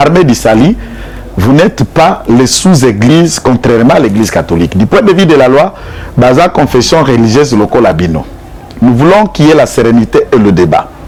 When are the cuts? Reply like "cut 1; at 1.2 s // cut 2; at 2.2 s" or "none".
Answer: none